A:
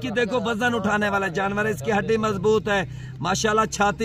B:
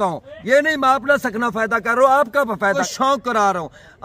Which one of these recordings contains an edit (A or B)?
B